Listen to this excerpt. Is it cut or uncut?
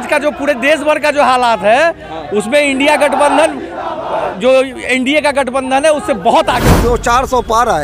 cut